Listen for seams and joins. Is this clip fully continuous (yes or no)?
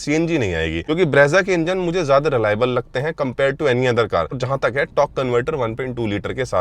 no